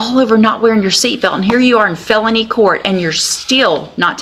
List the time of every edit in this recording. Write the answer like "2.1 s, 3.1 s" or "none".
none